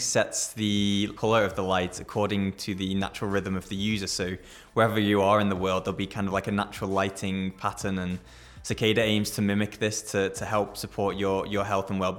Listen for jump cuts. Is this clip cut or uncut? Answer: uncut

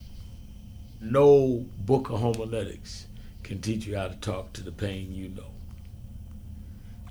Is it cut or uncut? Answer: cut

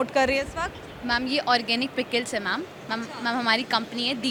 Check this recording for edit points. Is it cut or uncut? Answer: uncut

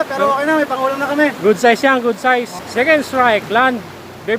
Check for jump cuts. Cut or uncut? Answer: cut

